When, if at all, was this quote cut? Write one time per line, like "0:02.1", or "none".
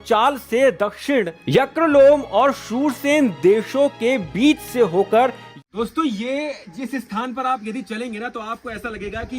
0:05.5